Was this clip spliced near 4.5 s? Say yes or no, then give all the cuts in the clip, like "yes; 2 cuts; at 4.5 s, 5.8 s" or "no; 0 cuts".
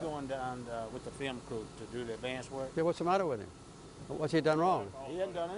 no; 1 cut; at 3.1 s